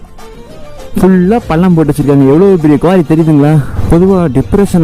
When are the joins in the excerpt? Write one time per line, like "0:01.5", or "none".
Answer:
0:03.7